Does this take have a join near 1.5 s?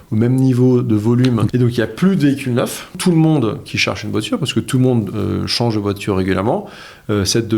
yes; 2 cuts; at 1.5 s, 3.0 s

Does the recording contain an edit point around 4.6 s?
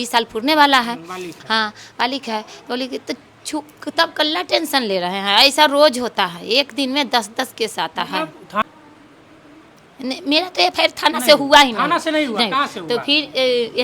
no; 1 cut; at 8.6 s

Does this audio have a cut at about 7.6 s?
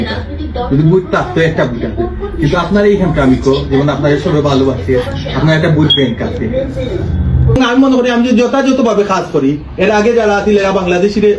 yes; 1 cut; at 7.6 s

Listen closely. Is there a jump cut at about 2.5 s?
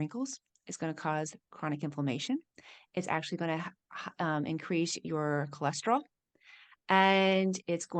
no; 0 cuts

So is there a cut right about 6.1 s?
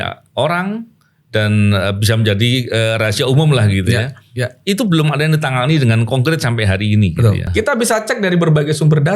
no; 1 cut; at 7.5 s

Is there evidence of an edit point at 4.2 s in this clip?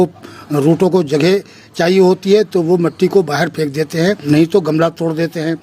yes; 1 cut; at 4.2 s

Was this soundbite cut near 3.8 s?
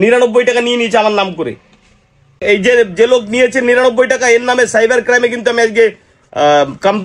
no; 1 cut; at 2.4 s

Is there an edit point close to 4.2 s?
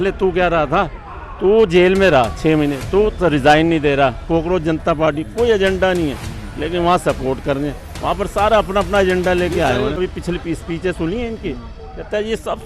yes; 2 cuts; at 4.2 s, 10.0 s

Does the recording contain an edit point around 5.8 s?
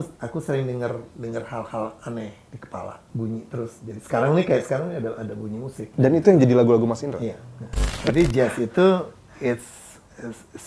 yes; 3 cuts; at 3.0 s, 5.8 s, 8.0 s

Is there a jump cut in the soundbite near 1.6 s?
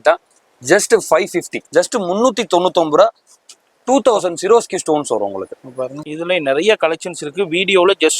yes; 2 cuts; at 1.6 s, 6.1 s

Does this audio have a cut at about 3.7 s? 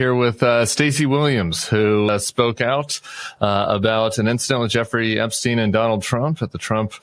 no; 1 cut; at 2.1 s

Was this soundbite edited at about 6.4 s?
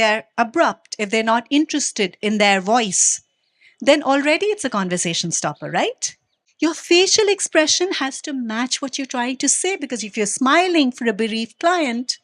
yes; 1 cut; at 6.4 s

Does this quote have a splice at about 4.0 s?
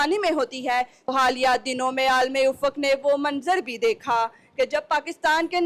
no; 1 cut; at 1.1 s

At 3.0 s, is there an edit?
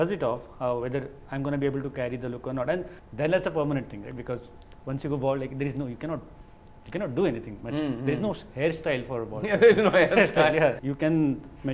yes; 2 cuts; at 3.0 s, 10.8 s

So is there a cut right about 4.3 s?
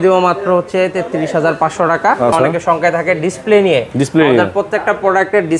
no; 1 cut; at 2.3 s

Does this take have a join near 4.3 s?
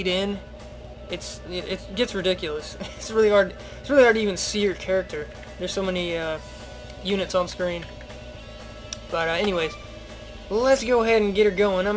yes; 1 cut; at 4.3 s

